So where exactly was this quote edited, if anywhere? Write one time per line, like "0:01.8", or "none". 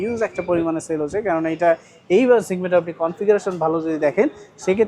none